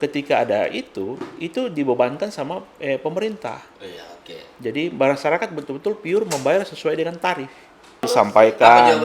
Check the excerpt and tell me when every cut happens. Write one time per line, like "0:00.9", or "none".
0:08.0